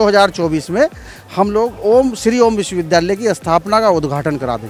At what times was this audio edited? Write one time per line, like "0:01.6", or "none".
none